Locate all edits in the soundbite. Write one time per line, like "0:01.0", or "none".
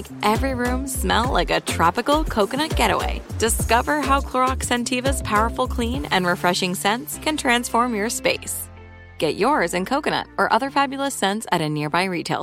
none